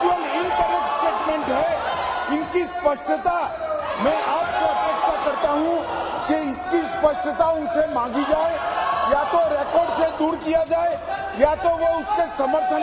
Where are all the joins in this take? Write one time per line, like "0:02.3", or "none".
none